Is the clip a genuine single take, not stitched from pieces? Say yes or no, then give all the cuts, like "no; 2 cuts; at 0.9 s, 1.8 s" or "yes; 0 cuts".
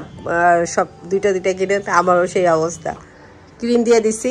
no; 1 cut; at 3.2 s